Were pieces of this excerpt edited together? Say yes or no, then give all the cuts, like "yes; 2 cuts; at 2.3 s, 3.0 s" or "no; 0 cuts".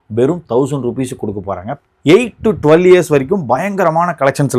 yes; 1 cut; at 1.8 s